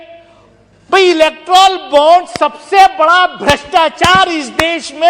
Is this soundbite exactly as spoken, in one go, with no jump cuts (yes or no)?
yes